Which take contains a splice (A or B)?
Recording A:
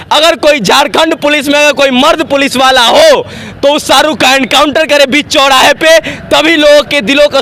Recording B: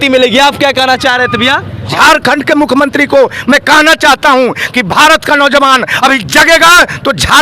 B